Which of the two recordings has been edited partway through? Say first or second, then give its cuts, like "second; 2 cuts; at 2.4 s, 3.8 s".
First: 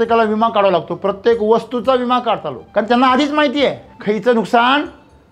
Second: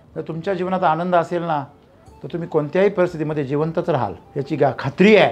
first; 2 cuts; at 2.6 s, 3.9 s